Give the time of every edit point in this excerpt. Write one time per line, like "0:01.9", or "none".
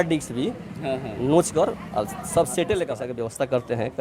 0:03.1